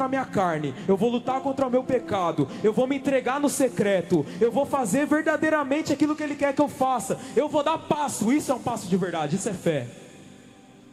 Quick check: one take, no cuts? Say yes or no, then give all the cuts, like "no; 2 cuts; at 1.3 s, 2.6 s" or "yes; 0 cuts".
yes; 0 cuts